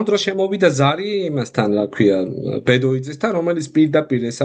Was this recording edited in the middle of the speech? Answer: no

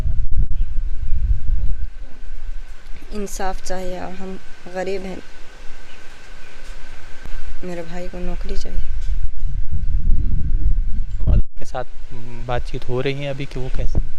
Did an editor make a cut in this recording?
no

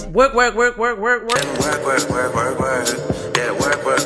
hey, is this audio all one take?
no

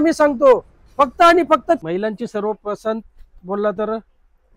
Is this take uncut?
no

